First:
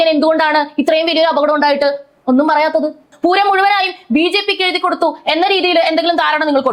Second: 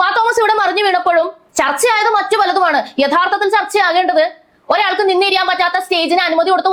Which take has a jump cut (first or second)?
first